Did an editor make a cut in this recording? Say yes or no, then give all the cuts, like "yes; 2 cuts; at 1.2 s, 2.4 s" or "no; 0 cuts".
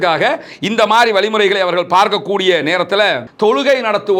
yes; 1 cut; at 3.2 s